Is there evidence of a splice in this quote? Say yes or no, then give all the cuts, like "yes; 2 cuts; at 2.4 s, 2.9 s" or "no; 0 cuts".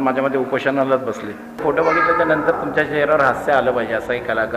yes; 1 cut; at 1.6 s